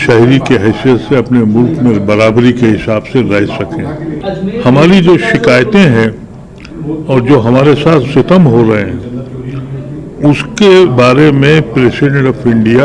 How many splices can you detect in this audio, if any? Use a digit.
1